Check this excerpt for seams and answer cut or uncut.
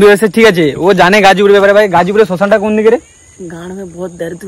uncut